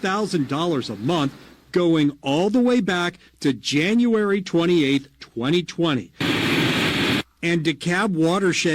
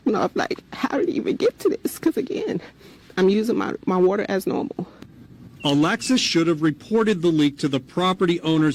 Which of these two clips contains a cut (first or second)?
first